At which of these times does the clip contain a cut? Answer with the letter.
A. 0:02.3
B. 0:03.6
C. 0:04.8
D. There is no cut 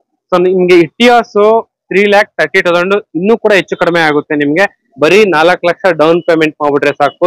C